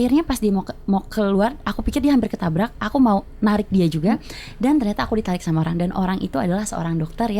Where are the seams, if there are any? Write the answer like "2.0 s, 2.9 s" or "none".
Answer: none